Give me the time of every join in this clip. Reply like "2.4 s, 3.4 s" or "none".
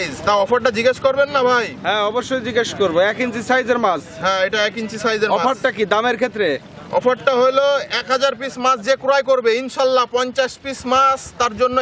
none

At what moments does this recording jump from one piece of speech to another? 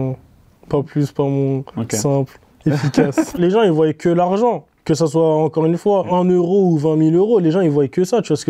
3.4 s, 6.1 s

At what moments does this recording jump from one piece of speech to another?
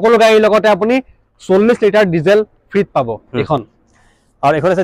none

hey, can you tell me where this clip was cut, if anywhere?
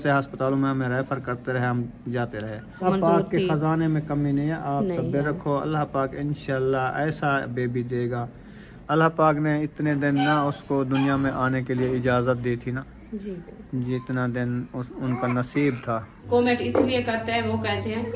2.8 s, 8.8 s, 12.9 s, 16.2 s

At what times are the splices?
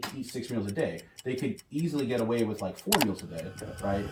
none

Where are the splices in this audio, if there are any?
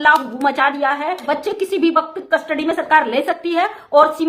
1.2 s

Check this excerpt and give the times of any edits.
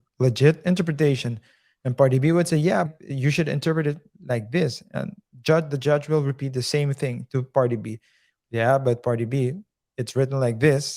2.9 s

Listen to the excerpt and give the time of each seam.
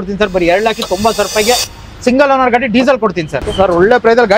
3.5 s

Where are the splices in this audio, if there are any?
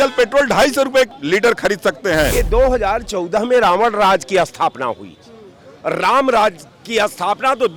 1.2 s, 2.3 s

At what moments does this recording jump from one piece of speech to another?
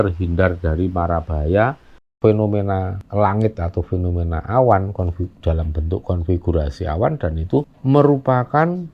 2.1 s

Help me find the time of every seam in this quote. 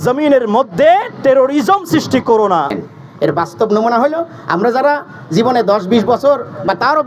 2.7 s

